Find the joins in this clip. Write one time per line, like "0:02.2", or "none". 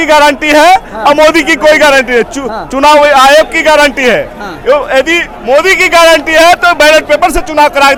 none